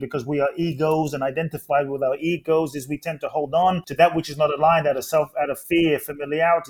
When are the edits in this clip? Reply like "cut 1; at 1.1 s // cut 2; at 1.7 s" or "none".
cut 1; at 3.9 s // cut 2; at 5.6 s